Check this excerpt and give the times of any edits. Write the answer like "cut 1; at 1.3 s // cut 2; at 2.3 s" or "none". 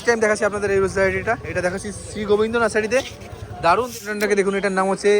cut 1; at 4.0 s